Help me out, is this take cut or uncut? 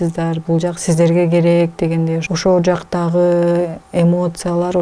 cut